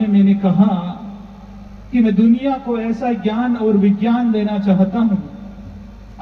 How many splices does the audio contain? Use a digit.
0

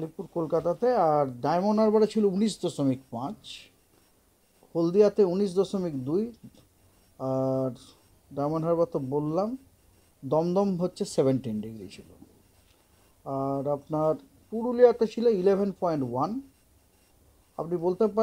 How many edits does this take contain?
0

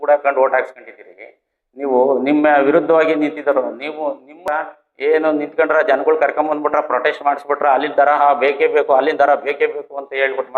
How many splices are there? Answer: 1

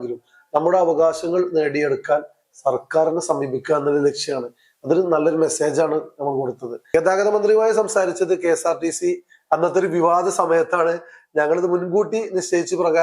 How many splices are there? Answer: 1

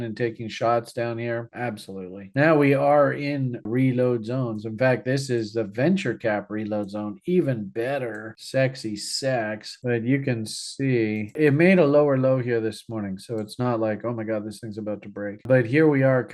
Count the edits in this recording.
3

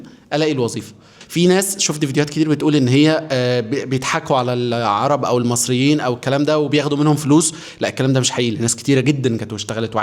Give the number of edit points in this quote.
1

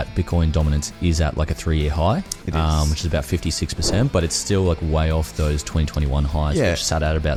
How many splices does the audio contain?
0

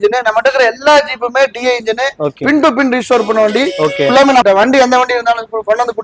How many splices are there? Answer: 1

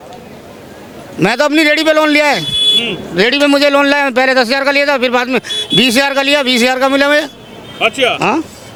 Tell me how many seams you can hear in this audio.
0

